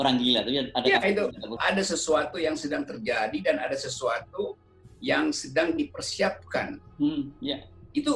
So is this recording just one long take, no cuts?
no; 1 cut; at 1.6 s

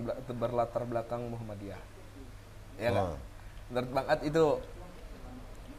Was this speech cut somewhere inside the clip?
no; 0 cuts

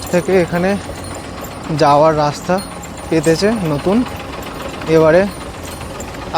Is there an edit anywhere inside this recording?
no; 0 cuts

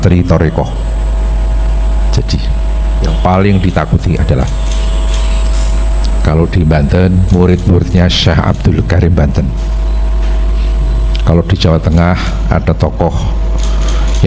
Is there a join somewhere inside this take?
no; 0 cuts

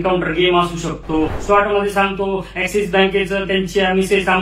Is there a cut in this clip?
yes; 1 cut; at 1.4 s

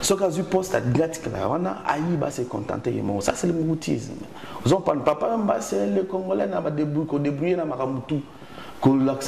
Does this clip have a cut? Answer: no; 0 cuts

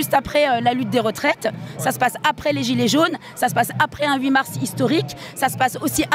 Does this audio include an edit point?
no; 0 cuts

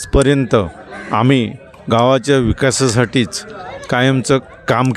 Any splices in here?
no; 0 cuts

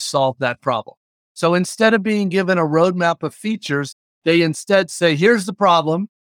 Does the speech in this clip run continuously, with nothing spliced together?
no; 1 cut; at 4.0 s

